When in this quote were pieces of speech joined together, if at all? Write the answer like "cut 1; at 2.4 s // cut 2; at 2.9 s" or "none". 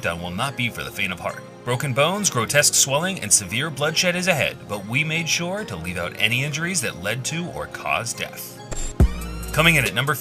cut 1; at 6.5 s